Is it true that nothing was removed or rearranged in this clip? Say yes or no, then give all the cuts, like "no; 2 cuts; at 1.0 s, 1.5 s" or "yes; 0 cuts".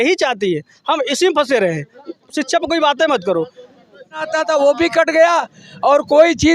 no; 1 cut; at 4.3 s